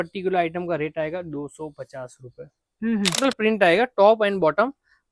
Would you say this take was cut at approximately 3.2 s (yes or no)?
yes